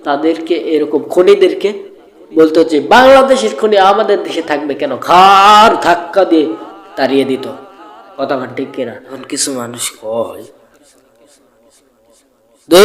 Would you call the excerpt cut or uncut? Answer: cut